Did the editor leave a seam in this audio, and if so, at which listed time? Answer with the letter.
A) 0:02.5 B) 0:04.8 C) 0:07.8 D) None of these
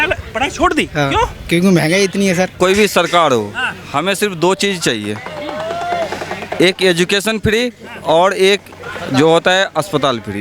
A